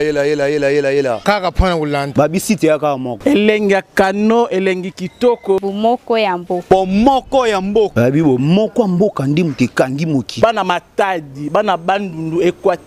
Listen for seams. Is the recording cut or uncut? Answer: cut